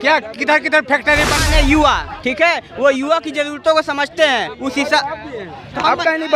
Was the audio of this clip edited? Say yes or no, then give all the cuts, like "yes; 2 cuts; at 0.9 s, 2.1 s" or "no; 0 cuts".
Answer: yes; 1 cut; at 1.4 s